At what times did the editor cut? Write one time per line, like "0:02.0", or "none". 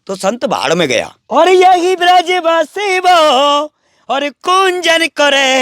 0:01.2